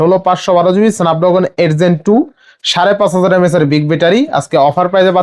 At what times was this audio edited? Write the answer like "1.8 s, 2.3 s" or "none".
none